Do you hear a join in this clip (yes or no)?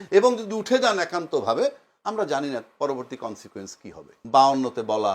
yes